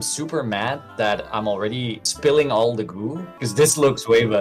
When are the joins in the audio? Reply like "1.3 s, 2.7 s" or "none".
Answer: 2.1 s, 3.4 s